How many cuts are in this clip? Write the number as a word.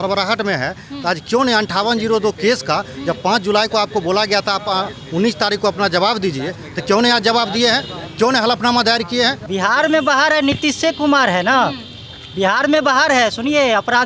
one